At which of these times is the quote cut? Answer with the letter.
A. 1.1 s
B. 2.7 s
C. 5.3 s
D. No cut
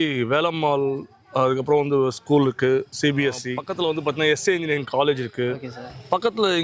D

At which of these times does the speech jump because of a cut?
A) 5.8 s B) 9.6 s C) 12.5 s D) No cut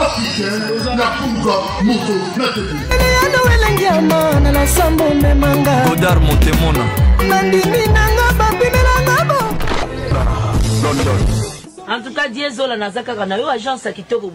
B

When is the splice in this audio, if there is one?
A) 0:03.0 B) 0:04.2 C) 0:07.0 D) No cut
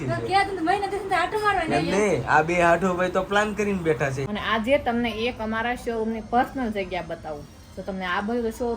B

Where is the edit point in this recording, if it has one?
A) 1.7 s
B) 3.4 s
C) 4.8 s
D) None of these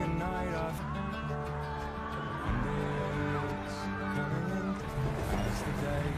C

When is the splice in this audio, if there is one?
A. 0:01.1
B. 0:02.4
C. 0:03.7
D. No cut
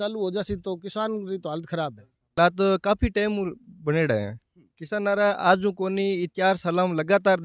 B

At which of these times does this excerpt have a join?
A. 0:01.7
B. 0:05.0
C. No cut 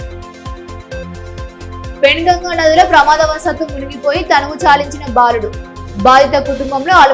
C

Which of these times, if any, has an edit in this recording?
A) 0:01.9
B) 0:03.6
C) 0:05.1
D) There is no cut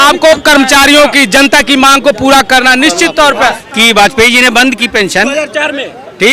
B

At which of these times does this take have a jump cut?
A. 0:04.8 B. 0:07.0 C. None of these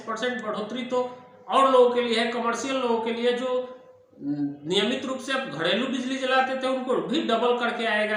C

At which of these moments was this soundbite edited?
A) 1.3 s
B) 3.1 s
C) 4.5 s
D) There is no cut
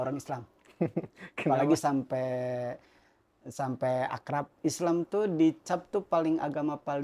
C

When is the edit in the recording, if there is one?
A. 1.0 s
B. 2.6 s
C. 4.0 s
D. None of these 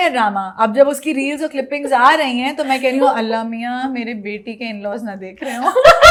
D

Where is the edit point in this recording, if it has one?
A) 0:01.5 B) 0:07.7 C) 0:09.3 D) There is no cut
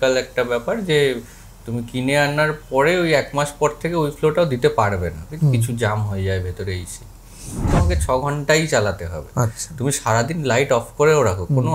B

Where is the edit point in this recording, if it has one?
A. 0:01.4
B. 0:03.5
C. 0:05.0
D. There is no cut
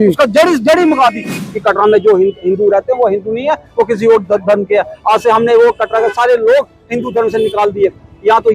A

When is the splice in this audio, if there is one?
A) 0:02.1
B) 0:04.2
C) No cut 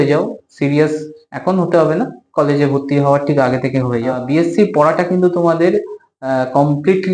B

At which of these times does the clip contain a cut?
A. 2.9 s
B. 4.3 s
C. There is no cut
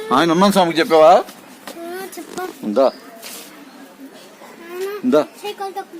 B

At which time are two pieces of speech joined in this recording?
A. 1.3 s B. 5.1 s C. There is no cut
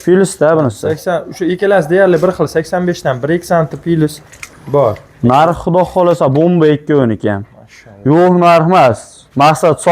A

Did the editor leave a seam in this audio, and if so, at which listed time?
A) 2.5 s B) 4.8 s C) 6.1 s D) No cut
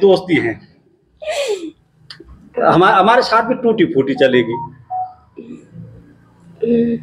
D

